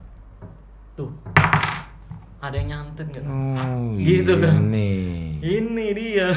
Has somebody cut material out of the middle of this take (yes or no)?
no